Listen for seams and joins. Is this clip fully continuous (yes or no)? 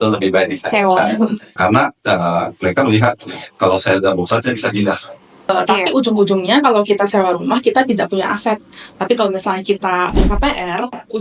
no